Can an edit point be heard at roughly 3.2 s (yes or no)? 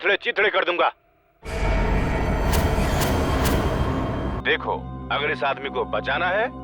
no